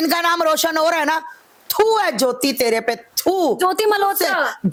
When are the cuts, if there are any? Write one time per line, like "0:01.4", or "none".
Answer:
none